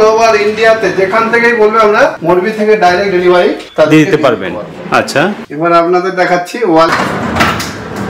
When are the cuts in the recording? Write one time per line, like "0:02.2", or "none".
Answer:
none